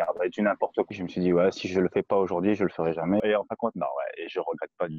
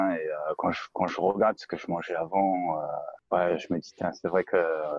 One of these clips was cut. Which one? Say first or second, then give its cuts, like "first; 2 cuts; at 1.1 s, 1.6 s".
first; 2 cuts; at 0.9 s, 3.2 s